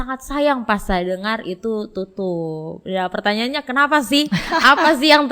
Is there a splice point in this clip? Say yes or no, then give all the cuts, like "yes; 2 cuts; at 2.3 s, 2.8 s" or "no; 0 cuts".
no; 0 cuts